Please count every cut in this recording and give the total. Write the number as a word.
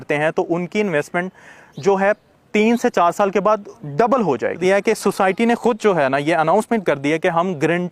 one